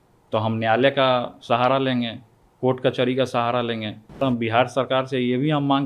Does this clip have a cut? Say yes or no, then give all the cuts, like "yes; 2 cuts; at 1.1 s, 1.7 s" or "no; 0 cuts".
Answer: yes; 1 cut; at 4.2 s